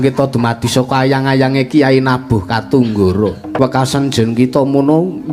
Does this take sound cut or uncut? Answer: cut